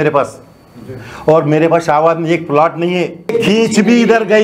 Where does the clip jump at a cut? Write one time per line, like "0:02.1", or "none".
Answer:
0:03.3